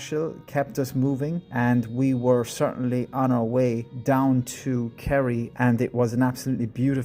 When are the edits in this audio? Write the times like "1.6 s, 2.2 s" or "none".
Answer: 1.4 s, 3.9 s, 5.5 s